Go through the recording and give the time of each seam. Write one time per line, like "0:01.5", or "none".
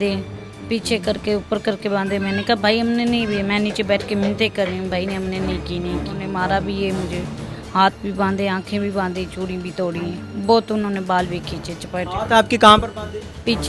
0:06.2